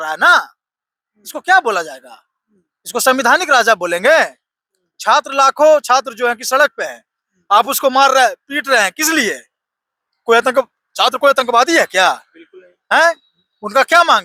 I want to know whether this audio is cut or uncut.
uncut